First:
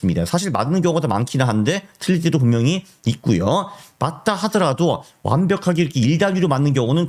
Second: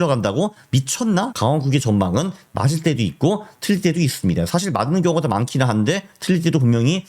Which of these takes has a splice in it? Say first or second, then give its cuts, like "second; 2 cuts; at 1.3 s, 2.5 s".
second; 1 cut; at 1.3 s